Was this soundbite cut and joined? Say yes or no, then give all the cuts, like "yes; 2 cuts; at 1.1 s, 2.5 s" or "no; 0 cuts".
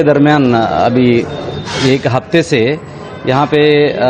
no; 0 cuts